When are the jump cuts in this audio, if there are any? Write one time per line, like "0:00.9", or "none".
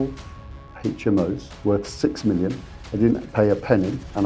0:01.5